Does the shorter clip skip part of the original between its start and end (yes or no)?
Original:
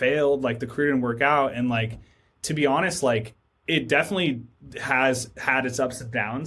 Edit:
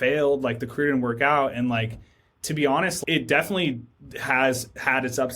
yes